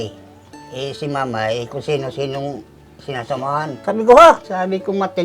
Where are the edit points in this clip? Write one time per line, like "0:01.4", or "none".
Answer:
0:03.8
0:04.4